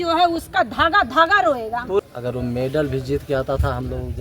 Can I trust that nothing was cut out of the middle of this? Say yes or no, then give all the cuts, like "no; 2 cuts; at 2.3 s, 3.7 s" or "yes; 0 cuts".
no; 1 cut; at 2.0 s